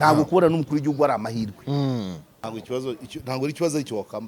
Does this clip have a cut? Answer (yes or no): yes